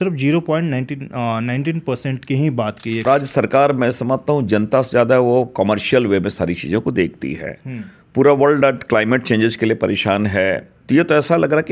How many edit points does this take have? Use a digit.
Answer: 2